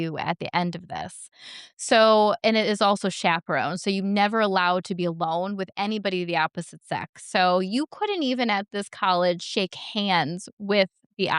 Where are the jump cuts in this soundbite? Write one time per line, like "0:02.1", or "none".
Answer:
none

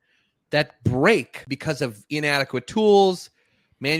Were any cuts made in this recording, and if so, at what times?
0:01.4

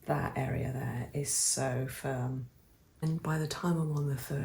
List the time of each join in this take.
0:03.0

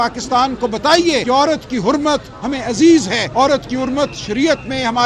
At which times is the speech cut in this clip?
0:01.2
0:03.2

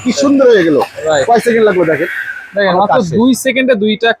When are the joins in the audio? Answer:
none

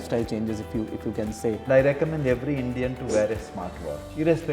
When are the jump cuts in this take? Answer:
0:01.6

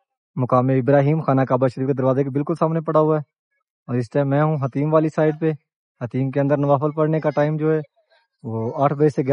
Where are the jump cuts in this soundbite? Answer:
none

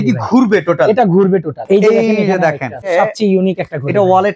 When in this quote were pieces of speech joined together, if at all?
0:01.6
0:02.9

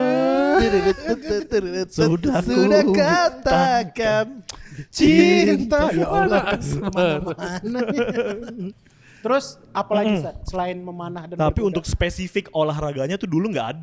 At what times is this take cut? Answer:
none

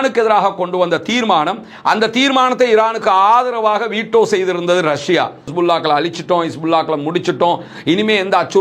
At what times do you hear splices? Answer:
0:05.5

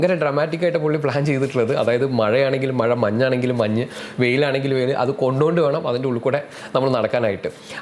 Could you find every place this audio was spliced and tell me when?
none

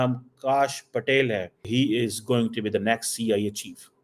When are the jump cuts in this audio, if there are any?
0:01.6

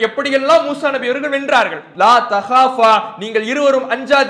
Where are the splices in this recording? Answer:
0:01.8

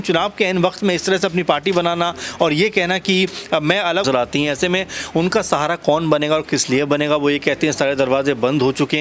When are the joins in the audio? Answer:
0:04.0

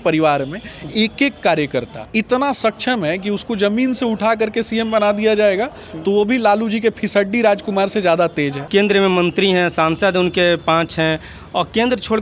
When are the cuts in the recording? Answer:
0:02.0
0:08.6

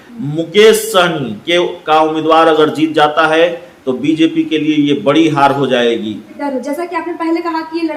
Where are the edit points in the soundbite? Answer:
0:06.3

